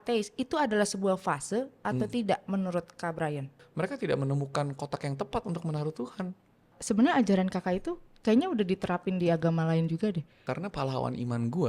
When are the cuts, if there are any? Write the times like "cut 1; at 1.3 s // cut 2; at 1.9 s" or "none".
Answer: cut 1; at 3.6 s // cut 2; at 6.8 s // cut 3; at 10.4 s